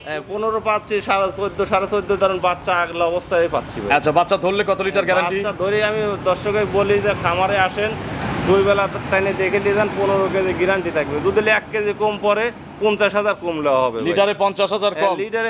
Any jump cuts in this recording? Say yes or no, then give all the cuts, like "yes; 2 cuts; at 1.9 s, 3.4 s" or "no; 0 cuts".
no; 0 cuts